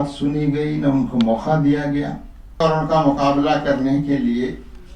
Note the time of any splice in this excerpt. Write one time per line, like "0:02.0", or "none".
0:02.6